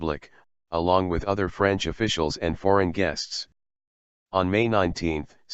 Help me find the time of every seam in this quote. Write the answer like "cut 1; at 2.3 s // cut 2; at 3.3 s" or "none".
cut 1; at 2.9 s